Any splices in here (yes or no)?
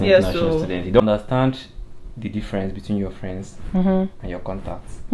yes